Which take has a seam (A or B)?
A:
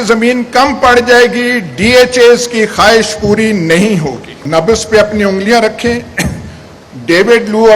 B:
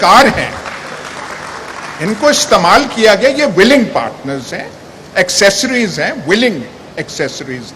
A